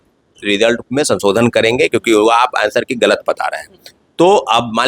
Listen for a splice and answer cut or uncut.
uncut